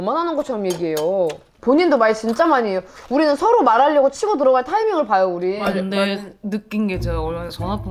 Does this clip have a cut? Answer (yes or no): no